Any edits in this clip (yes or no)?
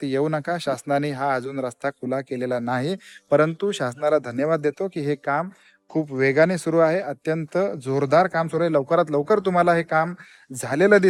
no